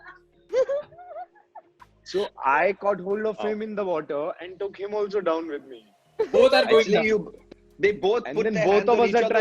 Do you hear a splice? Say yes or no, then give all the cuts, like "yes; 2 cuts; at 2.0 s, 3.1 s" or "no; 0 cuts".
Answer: no; 0 cuts